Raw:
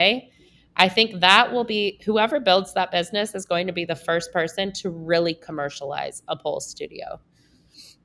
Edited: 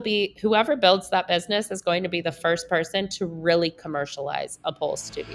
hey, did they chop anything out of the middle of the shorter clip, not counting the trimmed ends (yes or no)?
no